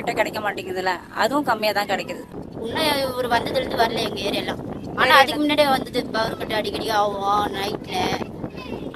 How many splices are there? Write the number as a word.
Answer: one